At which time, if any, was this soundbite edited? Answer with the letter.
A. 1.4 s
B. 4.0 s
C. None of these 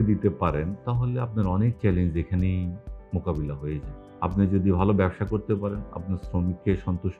C